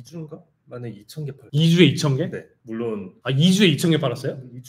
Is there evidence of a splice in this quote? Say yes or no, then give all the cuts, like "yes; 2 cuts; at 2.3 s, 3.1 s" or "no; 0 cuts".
yes; 2 cuts; at 1.4 s, 3.1 s